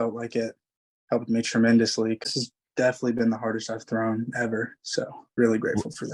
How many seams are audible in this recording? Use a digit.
2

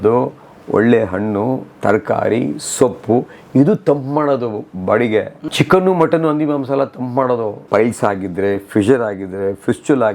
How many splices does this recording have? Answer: 2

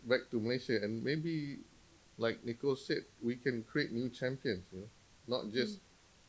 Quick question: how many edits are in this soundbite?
0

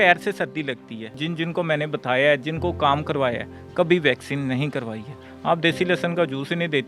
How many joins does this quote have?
1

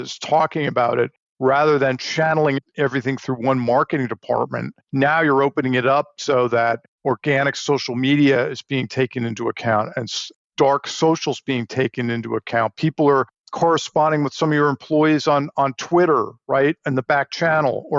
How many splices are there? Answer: 0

